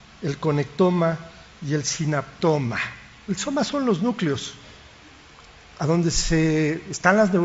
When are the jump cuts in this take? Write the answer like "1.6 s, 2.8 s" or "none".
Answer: none

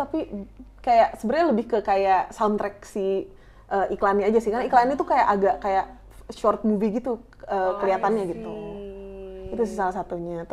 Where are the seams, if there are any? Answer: none

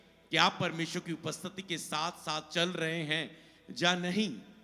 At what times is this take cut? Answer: none

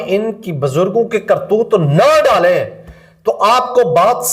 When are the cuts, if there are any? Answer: none

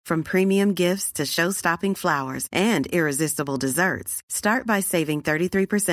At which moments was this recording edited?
none

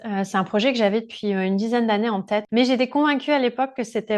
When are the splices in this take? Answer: 2.5 s

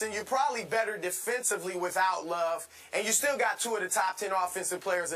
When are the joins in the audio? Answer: none

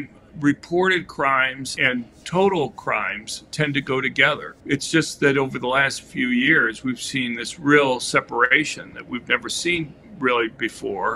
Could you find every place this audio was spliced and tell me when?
1.7 s, 4.5 s

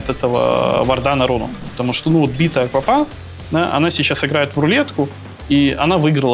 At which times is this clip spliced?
none

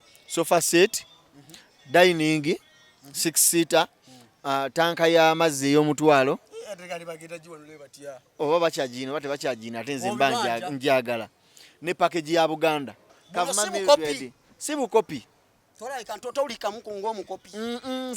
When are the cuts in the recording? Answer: 13.2 s

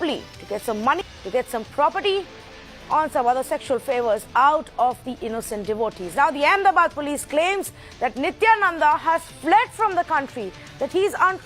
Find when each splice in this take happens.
1.0 s

